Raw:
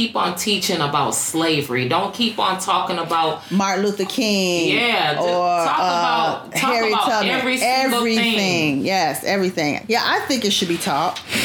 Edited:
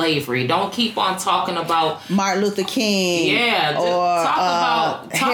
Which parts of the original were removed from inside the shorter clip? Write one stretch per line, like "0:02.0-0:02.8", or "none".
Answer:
none